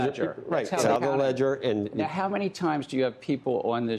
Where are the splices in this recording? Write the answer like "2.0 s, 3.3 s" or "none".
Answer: 0.9 s

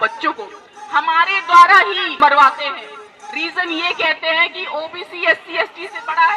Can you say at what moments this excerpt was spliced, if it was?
2.1 s

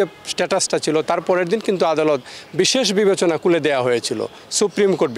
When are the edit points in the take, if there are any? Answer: none

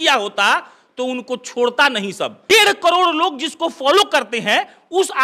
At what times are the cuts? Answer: 2.5 s

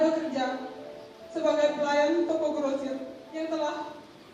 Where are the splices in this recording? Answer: 3.2 s

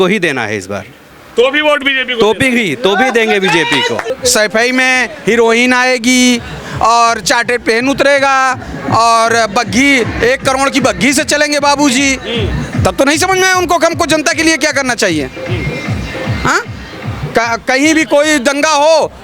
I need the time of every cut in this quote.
4.1 s

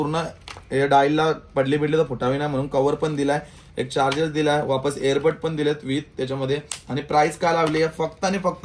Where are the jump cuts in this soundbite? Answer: none

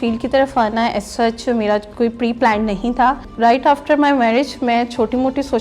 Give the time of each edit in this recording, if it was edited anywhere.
3.3 s

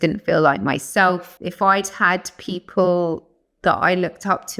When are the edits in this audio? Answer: 1.4 s

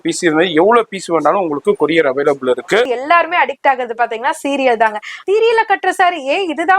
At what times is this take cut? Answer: 2.9 s, 5.2 s

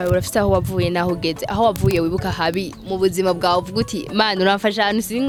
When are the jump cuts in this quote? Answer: none

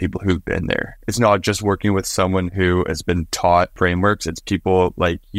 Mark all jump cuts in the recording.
0.9 s, 3.7 s

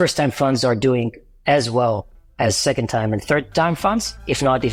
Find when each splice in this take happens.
none

